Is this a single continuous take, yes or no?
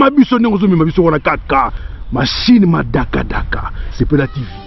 yes